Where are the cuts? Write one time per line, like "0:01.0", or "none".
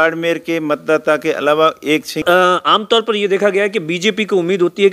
0:02.2